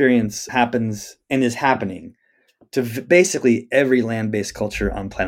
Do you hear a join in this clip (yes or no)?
no